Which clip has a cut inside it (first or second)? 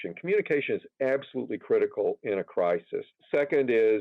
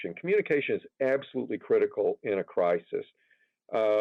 first